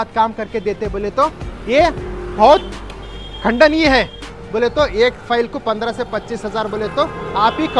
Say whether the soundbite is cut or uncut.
cut